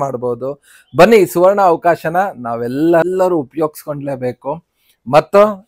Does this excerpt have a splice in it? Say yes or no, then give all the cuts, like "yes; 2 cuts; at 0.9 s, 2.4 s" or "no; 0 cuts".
no; 0 cuts